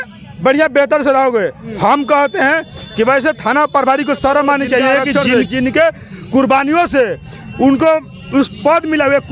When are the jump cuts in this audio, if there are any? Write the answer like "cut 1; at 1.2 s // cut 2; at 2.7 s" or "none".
cut 1; at 5.1 s

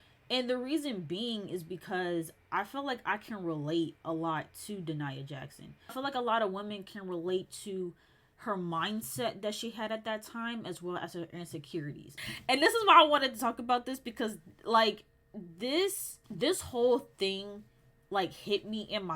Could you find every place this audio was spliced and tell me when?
cut 1; at 6.0 s // cut 2; at 12.2 s

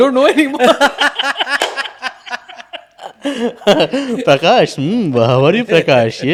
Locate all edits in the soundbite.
none

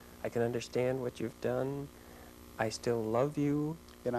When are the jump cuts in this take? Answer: none

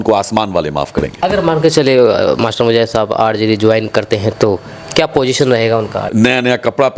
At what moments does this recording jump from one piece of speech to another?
cut 1; at 1.1 s // cut 2; at 6.0 s

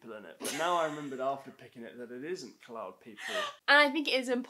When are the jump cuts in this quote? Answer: cut 1; at 3.6 s

